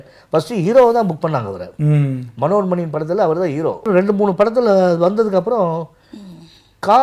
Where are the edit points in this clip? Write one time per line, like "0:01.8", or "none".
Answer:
0:03.9